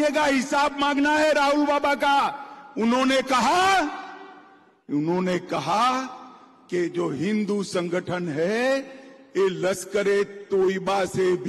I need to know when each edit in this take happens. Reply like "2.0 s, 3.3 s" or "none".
none